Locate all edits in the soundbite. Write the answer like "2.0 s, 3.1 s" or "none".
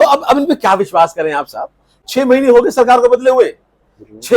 2.0 s